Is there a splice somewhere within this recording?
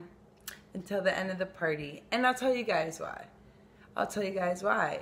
no; 0 cuts

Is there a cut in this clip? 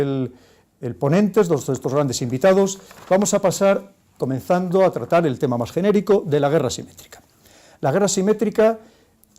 yes; 1 cut; at 5.7 s

